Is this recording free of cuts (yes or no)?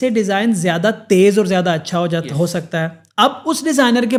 yes